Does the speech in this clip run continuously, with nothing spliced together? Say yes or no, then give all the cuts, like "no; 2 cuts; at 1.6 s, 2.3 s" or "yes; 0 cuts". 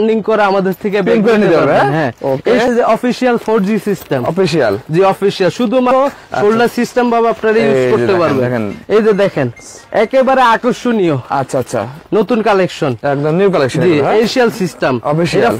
no; 3 cuts; at 2.7 s, 5.9 s, 14.3 s